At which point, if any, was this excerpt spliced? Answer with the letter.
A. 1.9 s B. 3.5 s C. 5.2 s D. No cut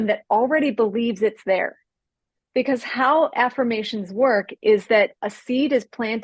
A